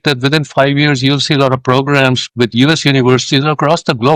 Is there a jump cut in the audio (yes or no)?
no